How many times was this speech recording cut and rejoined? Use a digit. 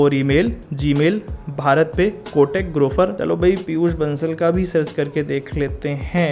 1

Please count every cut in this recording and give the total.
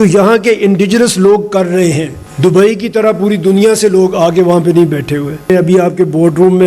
2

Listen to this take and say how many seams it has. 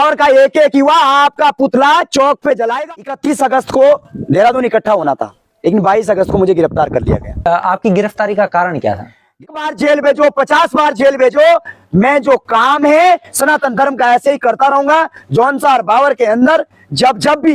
2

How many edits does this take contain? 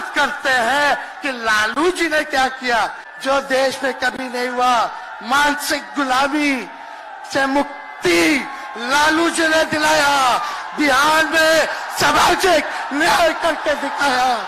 1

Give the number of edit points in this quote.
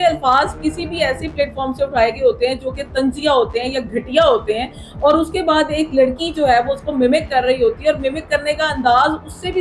0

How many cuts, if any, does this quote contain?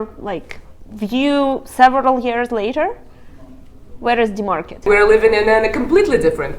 1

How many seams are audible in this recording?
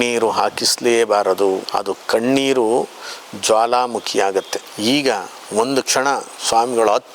2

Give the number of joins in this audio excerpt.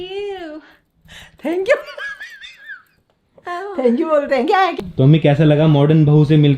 1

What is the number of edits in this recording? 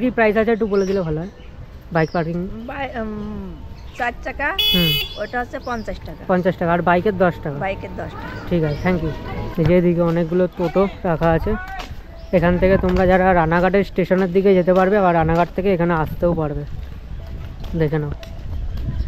0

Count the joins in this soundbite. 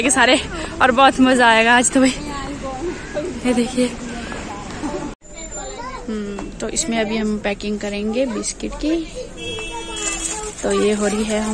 1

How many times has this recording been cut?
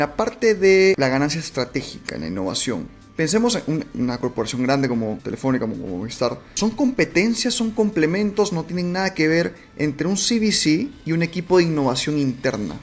3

